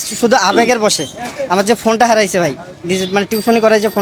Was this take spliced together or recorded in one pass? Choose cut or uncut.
uncut